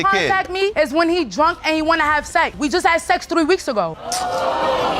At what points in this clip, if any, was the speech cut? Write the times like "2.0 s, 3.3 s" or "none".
2.6 s